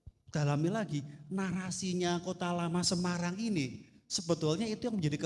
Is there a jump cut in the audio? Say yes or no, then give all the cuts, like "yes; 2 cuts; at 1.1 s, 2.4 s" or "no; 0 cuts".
no; 0 cuts